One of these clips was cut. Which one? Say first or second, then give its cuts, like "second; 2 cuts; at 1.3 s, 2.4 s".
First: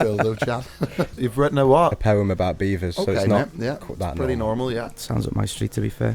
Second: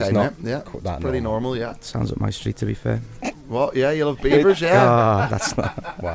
first; 1 cut; at 1.2 s